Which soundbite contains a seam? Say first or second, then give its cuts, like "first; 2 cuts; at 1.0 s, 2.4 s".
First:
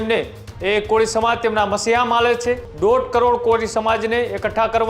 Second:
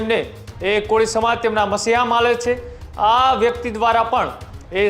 first; 1 cut; at 2.7 s